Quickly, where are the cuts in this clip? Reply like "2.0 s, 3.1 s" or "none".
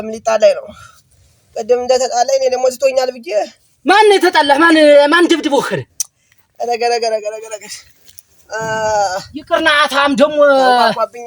none